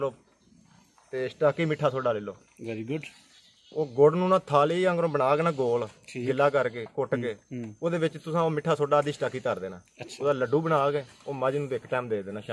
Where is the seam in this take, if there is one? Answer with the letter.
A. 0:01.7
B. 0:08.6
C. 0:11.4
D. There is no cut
D